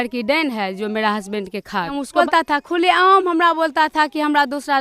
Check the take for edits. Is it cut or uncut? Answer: cut